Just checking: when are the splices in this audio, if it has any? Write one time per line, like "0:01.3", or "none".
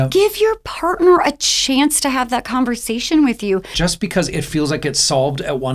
0:03.7